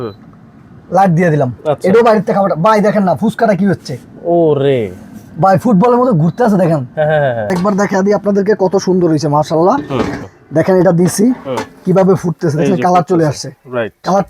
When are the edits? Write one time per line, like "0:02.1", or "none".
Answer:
0:07.5
0:10.2